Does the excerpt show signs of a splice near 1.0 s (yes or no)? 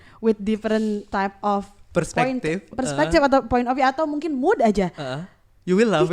yes